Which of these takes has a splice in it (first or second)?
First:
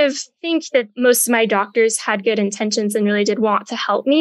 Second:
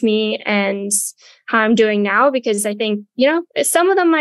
first